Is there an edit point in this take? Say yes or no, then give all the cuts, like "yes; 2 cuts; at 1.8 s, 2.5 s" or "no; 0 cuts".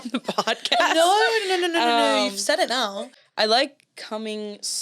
yes; 1 cut; at 3.0 s